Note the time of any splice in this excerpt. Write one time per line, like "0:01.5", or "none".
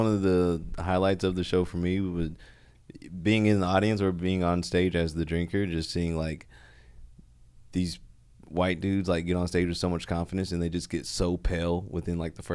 none